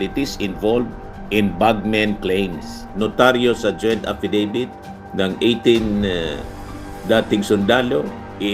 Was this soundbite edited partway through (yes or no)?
yes